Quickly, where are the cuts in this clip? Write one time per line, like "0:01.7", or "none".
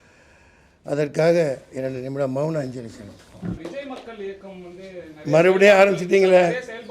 0:03.6